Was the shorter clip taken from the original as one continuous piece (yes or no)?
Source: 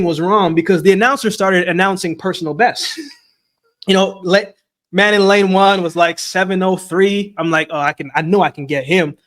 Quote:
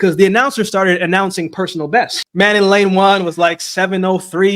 no